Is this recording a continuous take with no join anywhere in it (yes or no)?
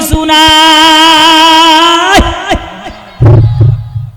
yes